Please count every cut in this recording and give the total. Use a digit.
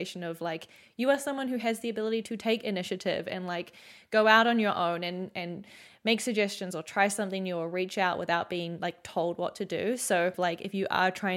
1